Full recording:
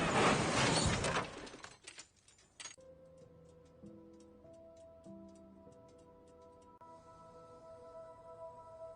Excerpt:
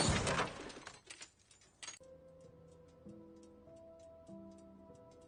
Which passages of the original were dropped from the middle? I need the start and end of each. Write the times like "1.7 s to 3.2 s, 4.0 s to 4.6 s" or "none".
none